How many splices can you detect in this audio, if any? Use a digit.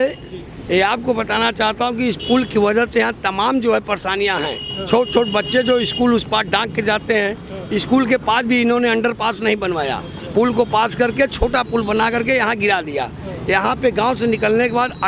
0